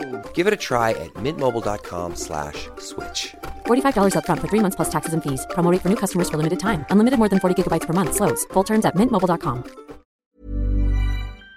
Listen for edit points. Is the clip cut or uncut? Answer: cut